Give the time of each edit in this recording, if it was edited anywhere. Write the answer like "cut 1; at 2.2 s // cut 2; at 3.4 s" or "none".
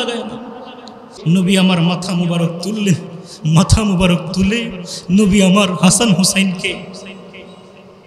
cut 1; at 1.1 s